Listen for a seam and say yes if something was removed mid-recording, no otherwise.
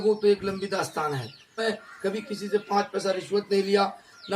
yes